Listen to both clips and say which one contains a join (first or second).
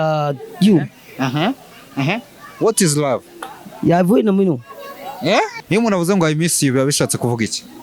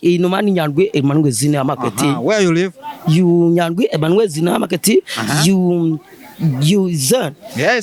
first